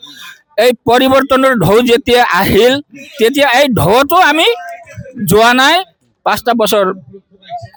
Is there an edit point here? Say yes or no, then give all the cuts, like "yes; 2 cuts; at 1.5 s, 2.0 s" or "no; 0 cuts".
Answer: no; 0 cuts